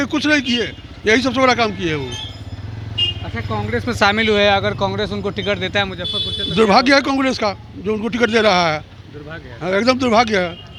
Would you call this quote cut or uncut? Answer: uncut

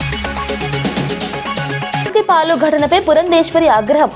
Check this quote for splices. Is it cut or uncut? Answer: cut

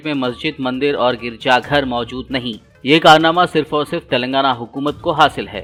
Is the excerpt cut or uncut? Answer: uncut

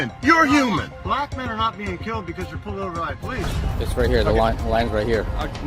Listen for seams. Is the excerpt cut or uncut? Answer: cut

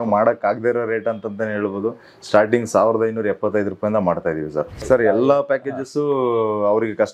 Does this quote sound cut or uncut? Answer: cut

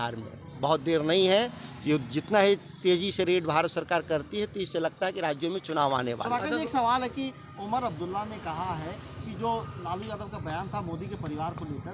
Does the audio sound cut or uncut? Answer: uncut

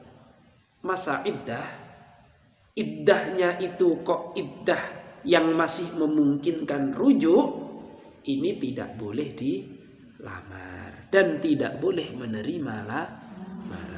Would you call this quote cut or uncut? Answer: uncut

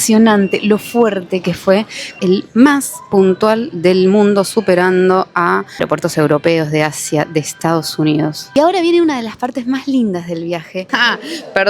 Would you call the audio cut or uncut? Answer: cut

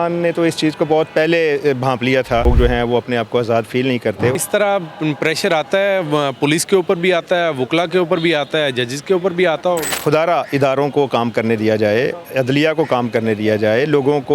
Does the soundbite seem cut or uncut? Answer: cut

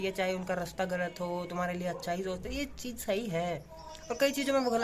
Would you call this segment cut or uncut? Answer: uncut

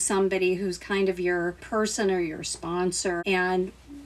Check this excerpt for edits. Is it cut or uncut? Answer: cut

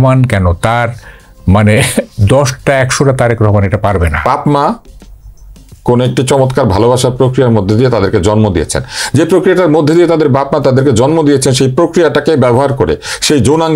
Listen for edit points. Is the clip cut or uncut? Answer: cut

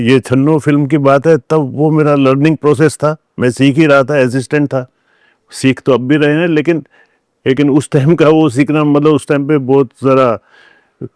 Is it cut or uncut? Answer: uncut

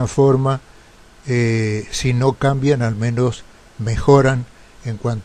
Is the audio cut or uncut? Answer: cut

